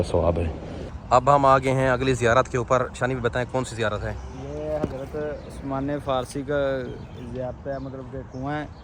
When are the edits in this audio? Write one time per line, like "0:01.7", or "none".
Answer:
0:00.9